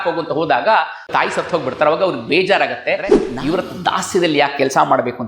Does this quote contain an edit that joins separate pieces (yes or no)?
yes